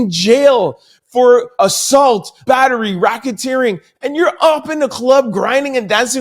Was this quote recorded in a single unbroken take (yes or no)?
no